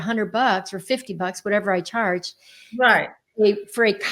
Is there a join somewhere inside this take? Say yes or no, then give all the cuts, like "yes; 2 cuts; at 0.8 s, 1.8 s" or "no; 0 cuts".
no; 0 cuts